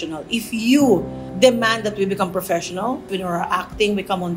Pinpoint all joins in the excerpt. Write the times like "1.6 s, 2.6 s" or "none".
3.1 s

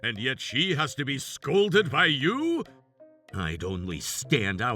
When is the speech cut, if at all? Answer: 2.7 s

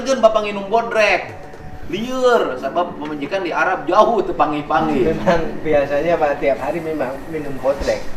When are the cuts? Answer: none

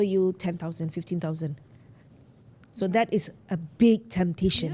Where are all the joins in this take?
none

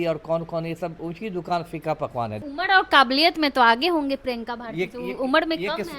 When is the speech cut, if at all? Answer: 2.4 s

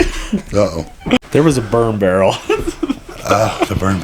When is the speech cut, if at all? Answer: 1.2 s

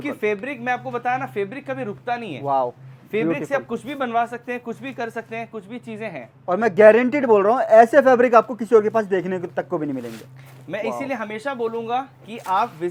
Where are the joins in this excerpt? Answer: none

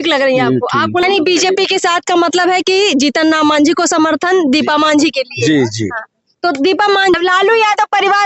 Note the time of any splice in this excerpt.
1.0 s, 7.2 s

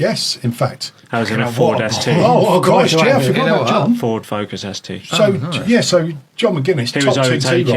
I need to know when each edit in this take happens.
none

